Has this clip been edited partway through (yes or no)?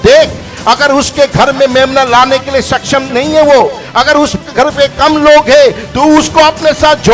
no